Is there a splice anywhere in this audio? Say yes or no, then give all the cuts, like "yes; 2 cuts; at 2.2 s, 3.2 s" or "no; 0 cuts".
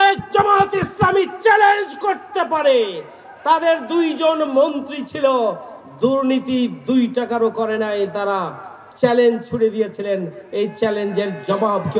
no; 0 cuts